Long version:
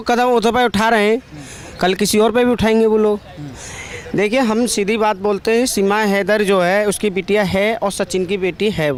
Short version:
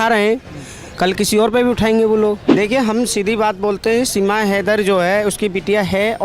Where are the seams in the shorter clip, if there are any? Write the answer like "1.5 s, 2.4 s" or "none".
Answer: 2.5 s

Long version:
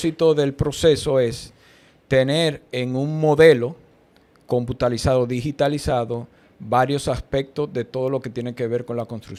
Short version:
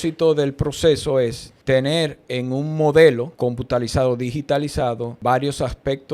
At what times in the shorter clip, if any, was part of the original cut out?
1.5 s, 3.3 s, 5.1 s

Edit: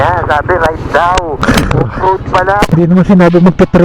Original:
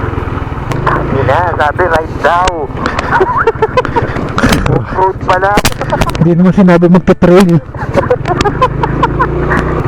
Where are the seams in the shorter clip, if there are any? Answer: 1.4 s, 2.7 s

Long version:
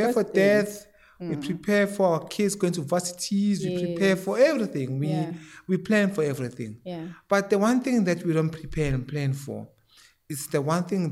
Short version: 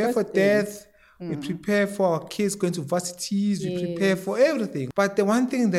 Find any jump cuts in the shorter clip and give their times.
4.8 s

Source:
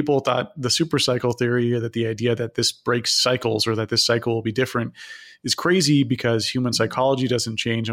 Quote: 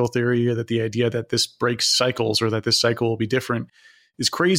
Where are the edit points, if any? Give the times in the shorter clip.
none

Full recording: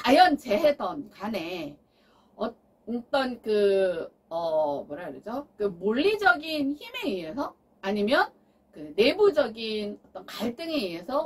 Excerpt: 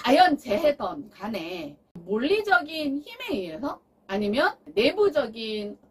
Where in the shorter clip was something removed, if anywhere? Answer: 2.0 s, 4.6 s

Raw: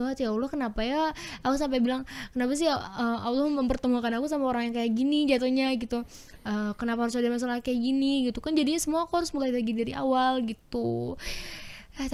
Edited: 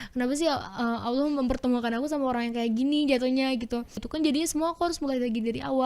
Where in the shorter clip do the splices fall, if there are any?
4.1 s

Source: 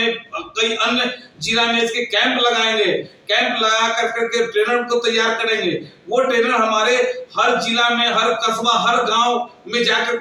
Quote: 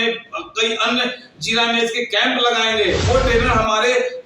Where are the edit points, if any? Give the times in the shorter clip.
3.0 s

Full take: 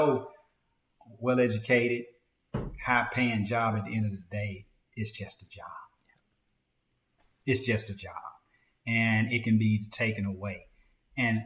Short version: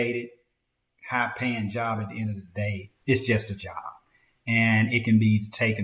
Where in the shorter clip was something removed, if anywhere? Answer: 2.9 s

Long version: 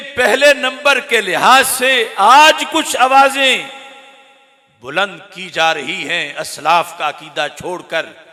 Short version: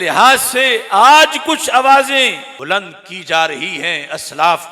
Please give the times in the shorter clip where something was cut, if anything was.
2.5 s

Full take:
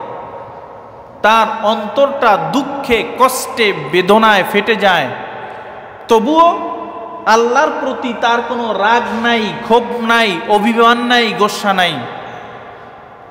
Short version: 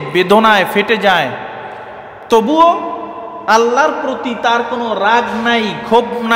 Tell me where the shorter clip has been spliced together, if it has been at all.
none

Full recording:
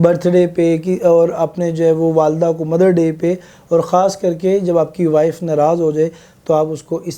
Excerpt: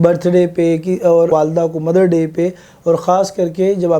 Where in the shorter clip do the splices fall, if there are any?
1.3 s

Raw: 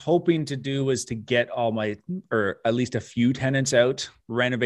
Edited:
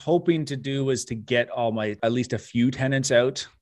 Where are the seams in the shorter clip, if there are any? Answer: 2.0 s

